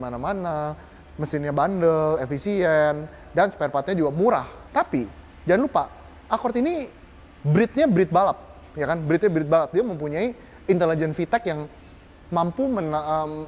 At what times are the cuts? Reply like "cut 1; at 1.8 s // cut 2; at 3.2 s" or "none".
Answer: cut 1; at 4.6 s